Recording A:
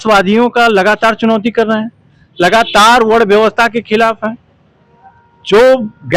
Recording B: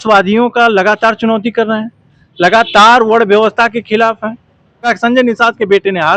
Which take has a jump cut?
B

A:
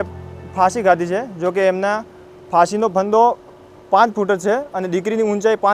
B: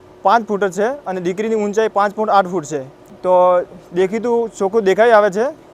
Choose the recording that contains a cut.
B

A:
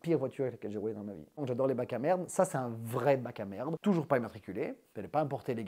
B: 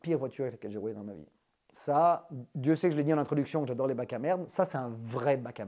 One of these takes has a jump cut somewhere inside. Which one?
A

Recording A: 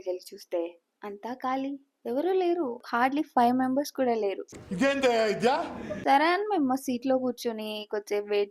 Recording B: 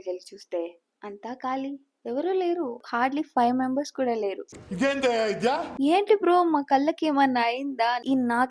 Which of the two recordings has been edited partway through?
B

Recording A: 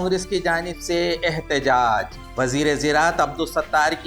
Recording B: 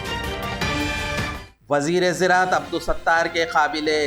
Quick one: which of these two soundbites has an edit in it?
B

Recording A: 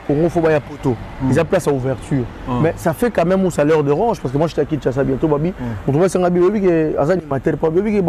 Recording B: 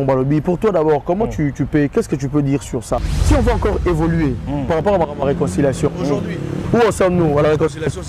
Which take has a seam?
B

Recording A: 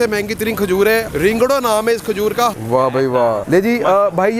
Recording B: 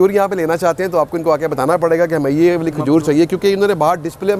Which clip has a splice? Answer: A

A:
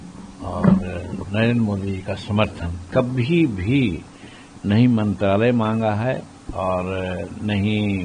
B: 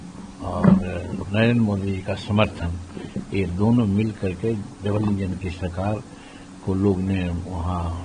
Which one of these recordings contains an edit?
A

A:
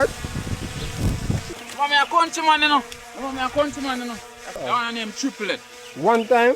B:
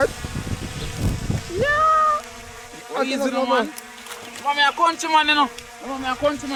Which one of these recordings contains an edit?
A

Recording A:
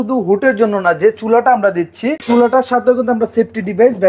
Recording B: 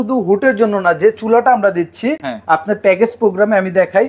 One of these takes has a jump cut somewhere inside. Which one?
A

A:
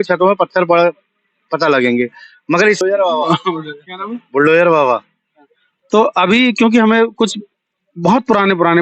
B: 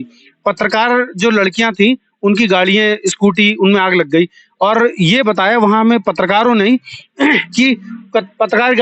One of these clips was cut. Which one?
A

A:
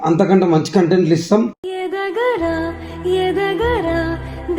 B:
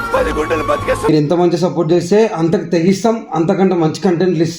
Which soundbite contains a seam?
B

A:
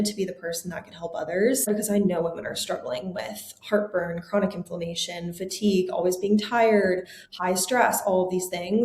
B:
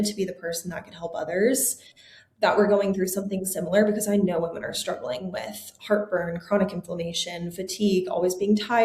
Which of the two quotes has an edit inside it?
A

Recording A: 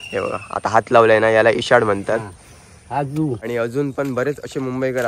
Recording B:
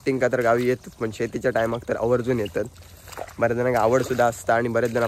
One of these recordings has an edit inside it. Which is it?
A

